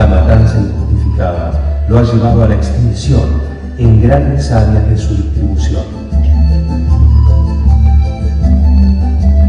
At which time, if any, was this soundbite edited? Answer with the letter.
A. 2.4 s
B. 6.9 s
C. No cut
B